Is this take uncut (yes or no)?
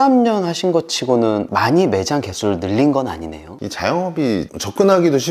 no